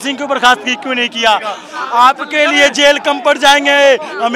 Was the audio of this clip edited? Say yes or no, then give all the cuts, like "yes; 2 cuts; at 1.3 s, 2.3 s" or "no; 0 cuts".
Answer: yes; 1 cut; at 1.6 s